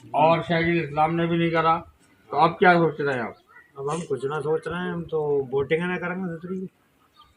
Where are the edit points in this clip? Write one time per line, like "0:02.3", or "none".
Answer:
none